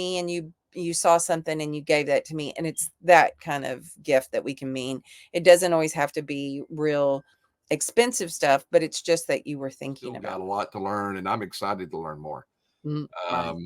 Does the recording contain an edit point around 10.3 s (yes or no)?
yes